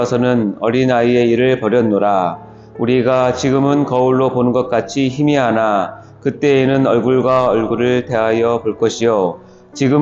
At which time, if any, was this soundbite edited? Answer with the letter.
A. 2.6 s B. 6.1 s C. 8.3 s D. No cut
A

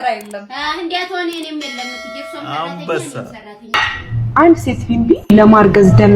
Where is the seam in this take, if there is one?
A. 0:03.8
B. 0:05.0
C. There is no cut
A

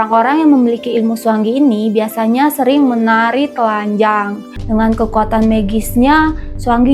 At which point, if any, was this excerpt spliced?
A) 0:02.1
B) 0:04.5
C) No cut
B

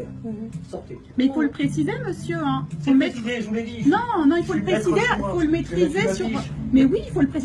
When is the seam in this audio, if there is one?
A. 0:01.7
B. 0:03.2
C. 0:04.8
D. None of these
B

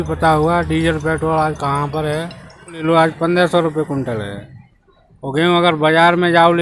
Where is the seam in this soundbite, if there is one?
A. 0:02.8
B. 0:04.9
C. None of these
A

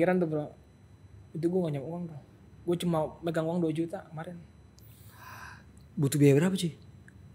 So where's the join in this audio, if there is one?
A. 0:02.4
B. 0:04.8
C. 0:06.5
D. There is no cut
D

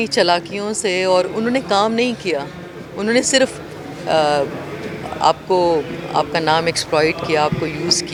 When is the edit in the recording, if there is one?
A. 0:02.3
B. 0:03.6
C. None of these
C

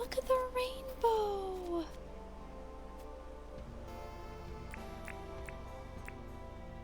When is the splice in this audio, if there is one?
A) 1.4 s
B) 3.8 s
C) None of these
C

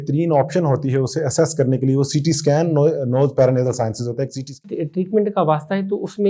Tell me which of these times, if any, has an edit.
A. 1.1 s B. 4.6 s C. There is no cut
B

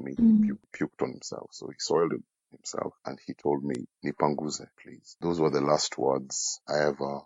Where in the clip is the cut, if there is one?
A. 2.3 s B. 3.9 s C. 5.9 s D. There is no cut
D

